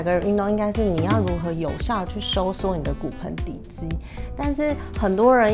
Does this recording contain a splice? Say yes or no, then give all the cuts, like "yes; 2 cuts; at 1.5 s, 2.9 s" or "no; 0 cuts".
no; 0 cuts